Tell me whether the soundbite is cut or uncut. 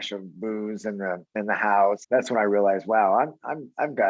cut